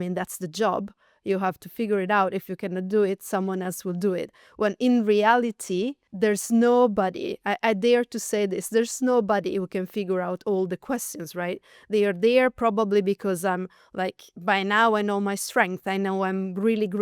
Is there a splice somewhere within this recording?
yes; 1 cut; at 6.0 s

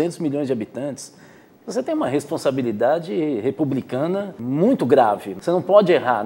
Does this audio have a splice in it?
yes; 2 cuts; at 4.4 s, 5.3 s

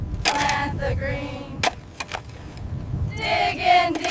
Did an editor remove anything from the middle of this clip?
no; 0 cuts

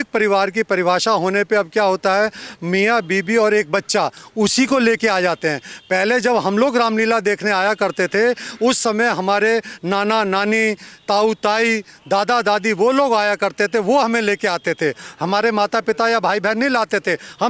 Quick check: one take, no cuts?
yes; 0 cuts

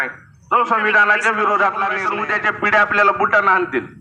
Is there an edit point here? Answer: yes; 1 cut; at 2.0 s

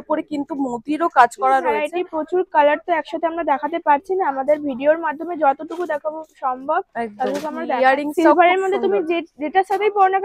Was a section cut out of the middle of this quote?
yes; 2 cuts; at 1.9 s, 7.6 s

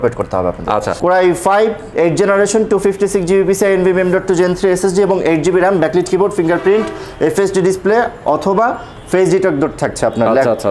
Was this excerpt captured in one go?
no; 1 cut; at 0.9 s

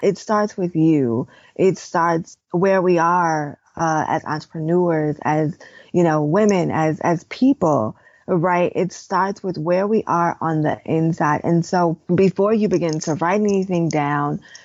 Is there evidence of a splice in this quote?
no; 0 cuts

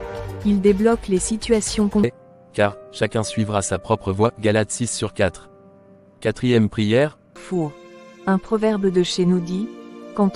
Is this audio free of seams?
no; 2 cuts; at 2.0 s, 7.3 s

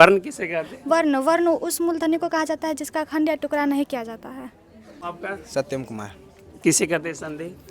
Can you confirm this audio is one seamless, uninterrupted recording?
no; 1 cut; at 5.1 s

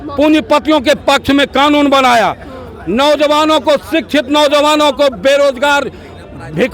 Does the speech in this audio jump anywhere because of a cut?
no; 0 cuts

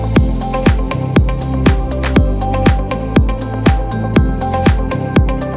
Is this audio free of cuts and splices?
yes; 0 cuts

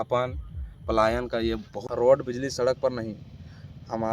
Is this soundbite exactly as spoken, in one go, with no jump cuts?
no; 1 cut; at 1.8 s

